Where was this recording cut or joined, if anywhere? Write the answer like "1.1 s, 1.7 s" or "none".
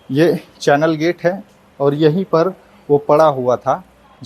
none